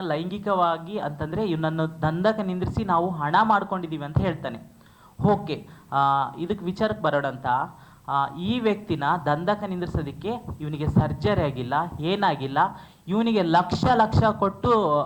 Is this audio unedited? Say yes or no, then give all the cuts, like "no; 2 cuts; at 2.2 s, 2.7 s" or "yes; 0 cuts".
yes; 0 cuts